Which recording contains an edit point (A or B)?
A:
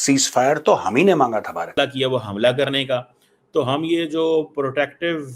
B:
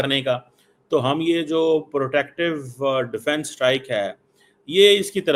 A